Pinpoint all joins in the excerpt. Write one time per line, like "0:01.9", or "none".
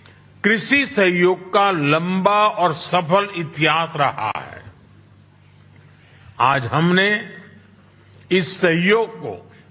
0:02.9